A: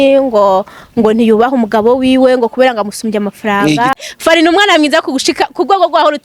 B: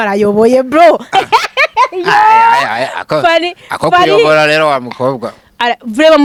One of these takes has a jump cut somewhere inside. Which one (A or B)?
A